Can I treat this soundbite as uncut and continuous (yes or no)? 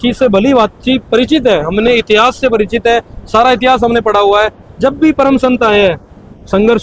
yes